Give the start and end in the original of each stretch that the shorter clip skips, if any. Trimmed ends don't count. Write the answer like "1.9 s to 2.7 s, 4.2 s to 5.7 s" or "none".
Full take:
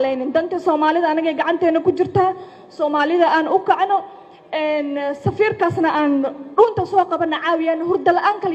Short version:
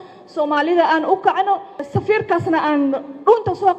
4.3 s to 5.2 s